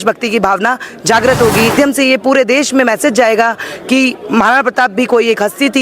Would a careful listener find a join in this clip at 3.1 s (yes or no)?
no